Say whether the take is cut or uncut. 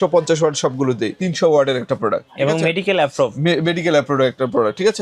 cut